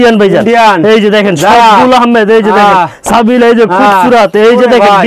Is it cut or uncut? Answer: uncut